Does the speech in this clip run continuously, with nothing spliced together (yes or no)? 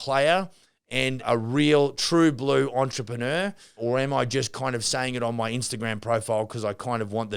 no